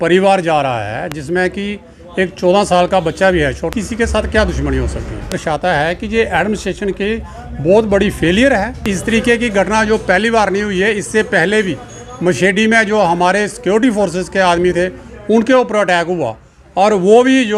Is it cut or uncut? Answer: cut